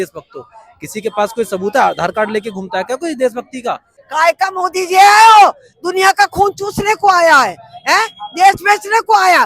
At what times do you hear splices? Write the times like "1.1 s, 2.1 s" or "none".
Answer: 4.0 s